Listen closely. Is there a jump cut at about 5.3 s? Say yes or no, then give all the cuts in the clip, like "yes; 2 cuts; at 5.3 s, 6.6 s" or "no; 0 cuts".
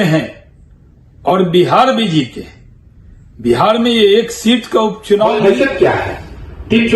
yes; 1 cut; at 5.3 s